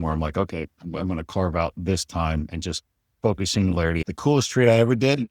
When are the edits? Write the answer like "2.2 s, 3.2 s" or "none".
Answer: 3.0 s, 4.0 s